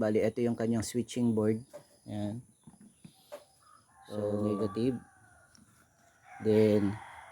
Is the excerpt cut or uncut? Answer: cut